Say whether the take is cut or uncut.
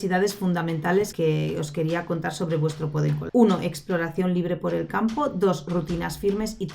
cut